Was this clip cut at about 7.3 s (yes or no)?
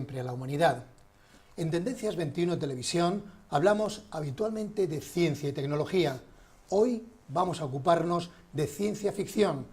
yes